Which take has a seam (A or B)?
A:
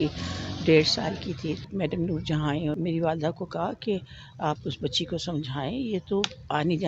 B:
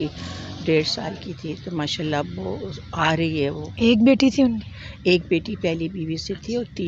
A